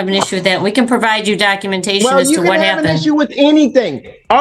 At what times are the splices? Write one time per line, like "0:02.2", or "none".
none